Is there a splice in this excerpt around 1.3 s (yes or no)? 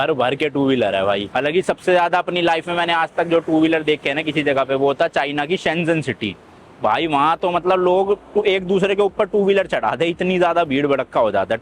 no